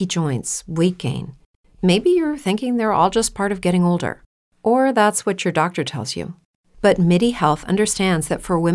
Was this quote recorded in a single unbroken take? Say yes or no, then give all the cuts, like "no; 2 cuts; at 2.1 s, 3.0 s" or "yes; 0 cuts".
yes; 0 cuts